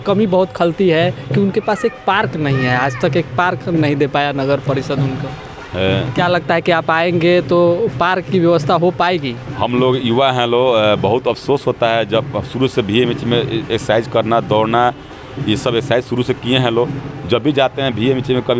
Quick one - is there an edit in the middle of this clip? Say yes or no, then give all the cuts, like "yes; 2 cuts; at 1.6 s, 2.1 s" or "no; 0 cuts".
no; 0 cuts